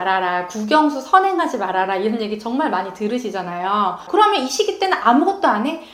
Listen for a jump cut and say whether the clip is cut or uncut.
cut